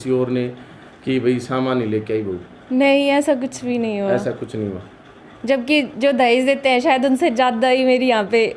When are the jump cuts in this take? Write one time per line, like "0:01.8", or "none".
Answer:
none